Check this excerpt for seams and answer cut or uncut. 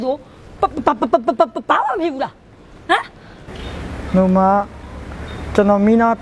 uncut